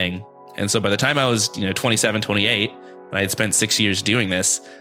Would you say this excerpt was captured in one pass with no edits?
yes; 0 cuts

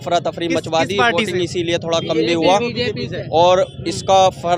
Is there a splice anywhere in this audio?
no; 0 cuts

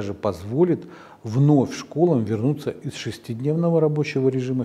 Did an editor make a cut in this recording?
no; 0 cuts

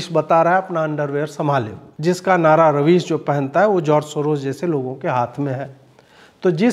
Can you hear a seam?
yes; 1 cut; at 1.8 s

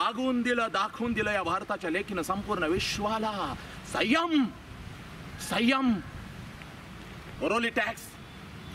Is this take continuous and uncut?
yes; 0 cuts

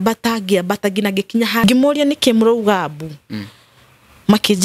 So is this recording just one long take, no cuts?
no; 1 cut; at 1.6 s

